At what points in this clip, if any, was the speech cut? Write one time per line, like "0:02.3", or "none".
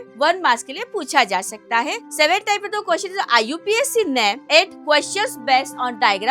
none